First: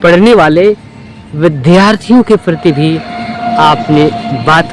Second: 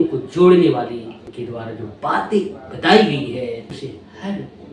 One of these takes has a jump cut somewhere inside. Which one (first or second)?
second